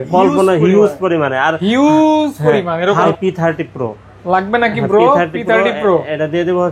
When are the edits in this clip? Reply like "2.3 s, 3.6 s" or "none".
3.1 s